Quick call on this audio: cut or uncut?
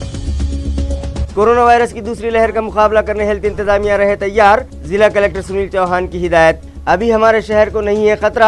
cut